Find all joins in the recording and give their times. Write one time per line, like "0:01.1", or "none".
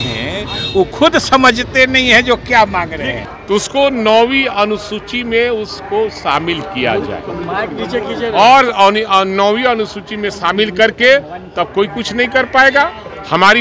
none